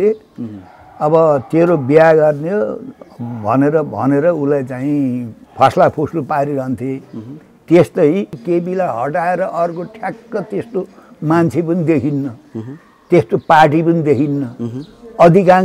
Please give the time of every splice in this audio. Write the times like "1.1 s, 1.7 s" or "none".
8.4 s